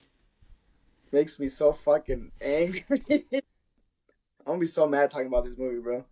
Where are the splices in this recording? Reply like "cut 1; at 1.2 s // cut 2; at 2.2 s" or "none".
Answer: cut 1; at 3.4 s